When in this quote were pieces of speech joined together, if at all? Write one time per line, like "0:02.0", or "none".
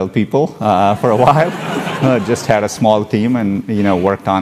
none